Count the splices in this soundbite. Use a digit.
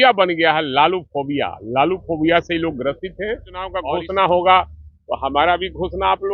1